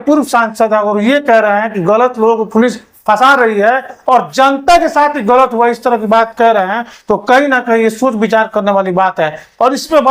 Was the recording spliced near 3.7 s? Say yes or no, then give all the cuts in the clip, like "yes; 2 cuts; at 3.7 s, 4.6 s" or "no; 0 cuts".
no; 0 cuts